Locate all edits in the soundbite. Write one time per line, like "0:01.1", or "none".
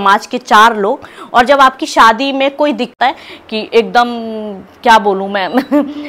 0:03.0